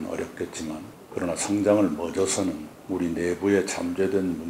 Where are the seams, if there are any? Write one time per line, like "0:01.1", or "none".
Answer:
0:01.0
0:02.7